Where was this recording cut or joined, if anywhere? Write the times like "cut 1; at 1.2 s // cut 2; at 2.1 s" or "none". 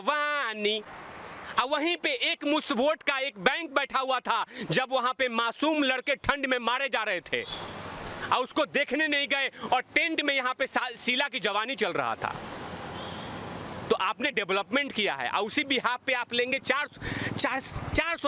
none